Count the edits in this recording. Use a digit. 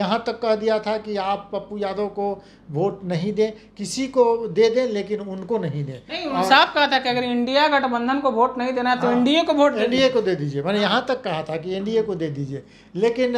0